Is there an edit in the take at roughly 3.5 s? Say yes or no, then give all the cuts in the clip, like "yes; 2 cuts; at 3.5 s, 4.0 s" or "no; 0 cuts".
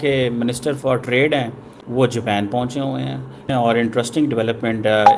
yes; 1 cut; at 3.5 s